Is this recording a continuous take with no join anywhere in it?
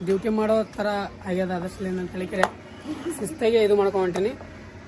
yes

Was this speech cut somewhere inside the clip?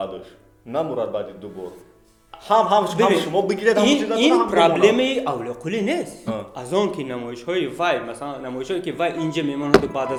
no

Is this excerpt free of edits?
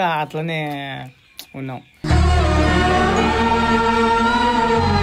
yes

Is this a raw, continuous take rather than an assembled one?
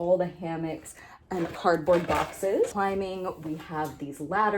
no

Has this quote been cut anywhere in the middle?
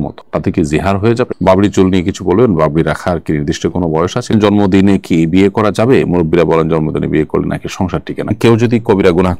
yes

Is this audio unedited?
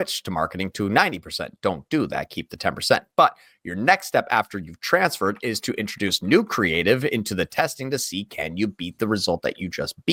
yes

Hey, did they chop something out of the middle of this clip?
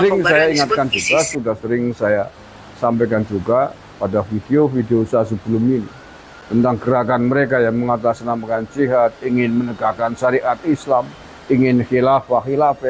no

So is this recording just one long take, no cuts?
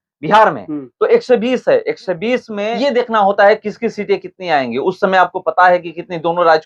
yes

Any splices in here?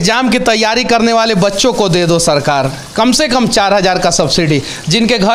no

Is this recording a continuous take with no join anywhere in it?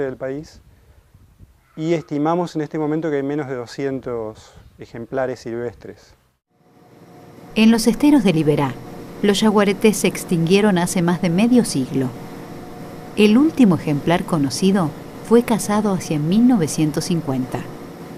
yes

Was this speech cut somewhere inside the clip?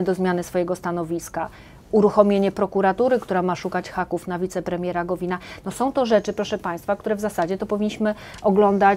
no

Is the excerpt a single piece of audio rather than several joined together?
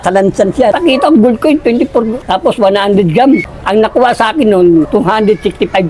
no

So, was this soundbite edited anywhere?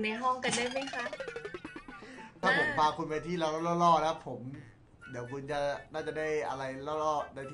yes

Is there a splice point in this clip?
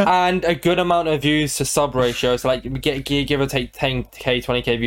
no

